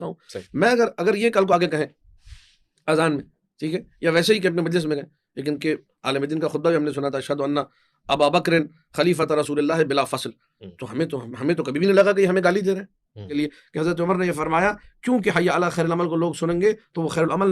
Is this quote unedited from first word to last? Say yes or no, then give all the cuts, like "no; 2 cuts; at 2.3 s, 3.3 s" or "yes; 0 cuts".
no; 1 cut; at 13.4 s